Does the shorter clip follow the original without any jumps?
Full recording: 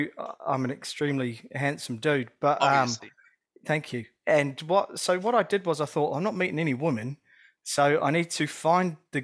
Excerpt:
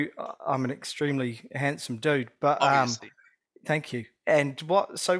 yes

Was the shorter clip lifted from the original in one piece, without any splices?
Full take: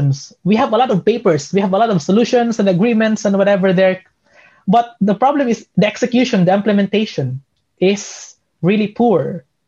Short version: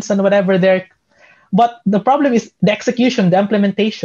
yes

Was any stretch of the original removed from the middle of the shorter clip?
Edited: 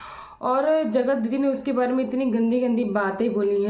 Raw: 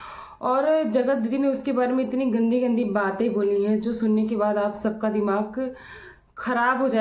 no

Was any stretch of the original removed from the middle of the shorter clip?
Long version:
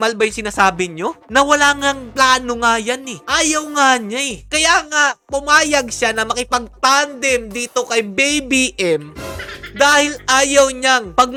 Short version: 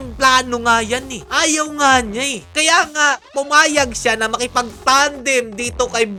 no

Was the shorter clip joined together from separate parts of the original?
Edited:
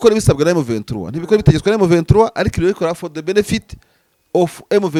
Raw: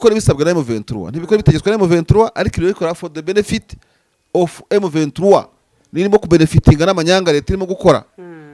no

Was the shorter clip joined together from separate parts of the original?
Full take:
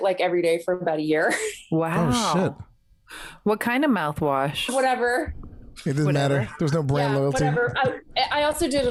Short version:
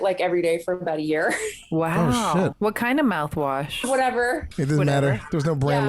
yes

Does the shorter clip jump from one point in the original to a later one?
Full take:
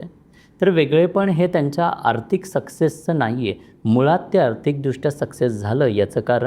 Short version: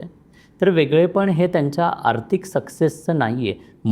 no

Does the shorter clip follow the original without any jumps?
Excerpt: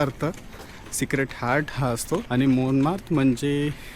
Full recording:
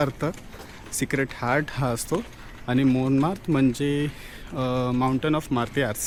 no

